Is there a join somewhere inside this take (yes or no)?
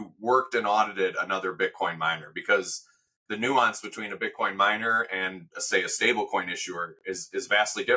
no